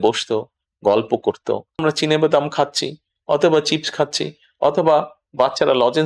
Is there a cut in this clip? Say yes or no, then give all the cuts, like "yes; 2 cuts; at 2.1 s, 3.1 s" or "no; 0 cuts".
yes; 1 cut; at 1.8 s